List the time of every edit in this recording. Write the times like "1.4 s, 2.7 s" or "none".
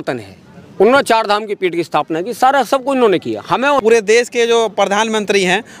3.8 s